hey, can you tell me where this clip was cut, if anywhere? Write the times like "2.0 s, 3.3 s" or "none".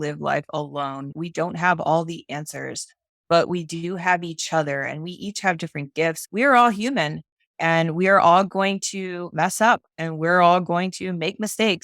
1.1 s, 6.2 s